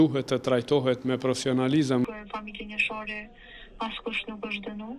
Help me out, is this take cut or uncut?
cut